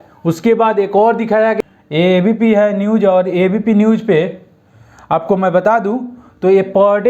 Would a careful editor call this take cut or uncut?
cut